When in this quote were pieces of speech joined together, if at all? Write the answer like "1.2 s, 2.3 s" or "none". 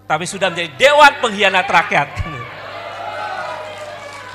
none